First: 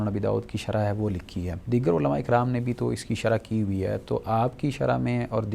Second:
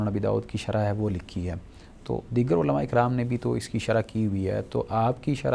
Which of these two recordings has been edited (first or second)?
first